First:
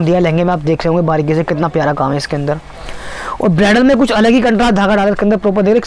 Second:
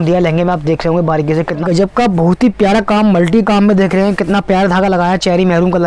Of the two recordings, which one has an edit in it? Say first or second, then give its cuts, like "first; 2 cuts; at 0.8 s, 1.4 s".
second; 1 cut; at 1.6 s